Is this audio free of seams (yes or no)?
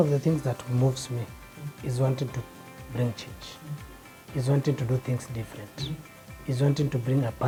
yes